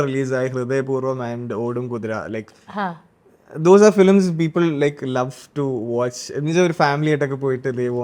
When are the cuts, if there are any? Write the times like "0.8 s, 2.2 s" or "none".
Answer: none